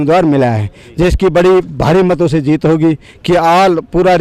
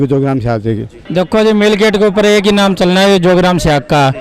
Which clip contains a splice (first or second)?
second